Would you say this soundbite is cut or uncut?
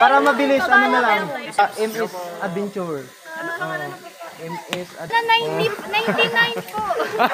cut